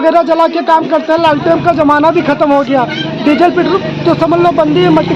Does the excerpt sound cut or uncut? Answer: uncut